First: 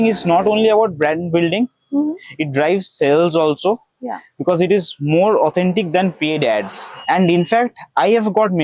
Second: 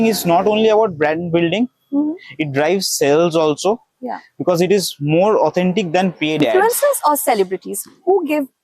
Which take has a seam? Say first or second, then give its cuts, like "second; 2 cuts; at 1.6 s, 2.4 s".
second; 1 cut; at 6.5 s